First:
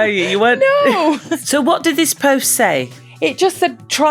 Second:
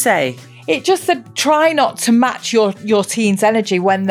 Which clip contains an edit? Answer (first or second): first